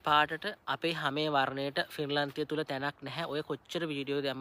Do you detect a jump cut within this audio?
no; 0 cuts

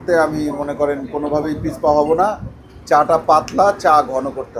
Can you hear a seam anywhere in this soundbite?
no; 0 cuts

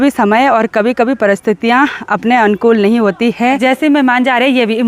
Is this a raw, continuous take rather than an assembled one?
no; 1 cut; at 3.6 s

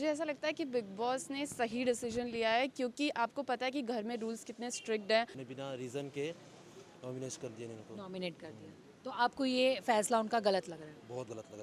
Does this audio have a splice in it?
yes; 1 cut; at 5.4 s

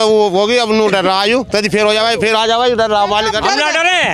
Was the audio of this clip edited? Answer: no; 0 cuts

